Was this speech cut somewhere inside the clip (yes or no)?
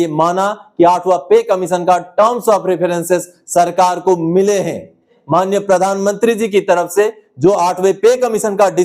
yes